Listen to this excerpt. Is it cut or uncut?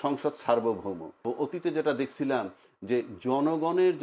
cut